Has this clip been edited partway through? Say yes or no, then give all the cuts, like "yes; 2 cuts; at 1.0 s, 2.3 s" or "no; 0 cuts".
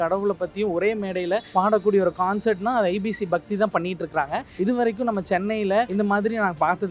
yes; 3 cuts; at 1.5 s, 4.5 s, 5.9 s